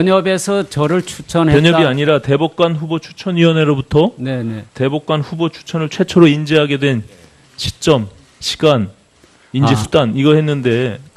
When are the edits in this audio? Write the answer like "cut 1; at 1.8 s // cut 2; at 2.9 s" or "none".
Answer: none